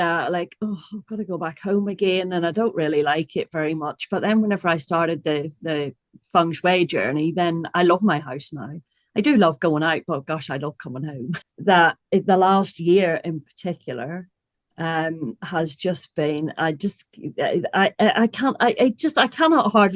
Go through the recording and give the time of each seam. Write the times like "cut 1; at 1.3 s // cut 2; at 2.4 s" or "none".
cut 1; at 11.4 s